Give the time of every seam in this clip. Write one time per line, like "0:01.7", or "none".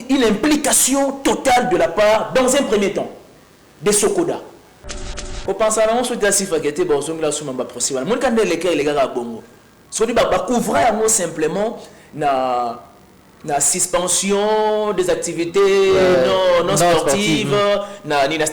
0:05.1